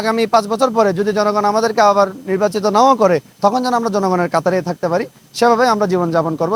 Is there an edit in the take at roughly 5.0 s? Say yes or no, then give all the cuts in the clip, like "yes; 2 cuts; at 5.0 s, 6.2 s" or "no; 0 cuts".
no; 0 cuts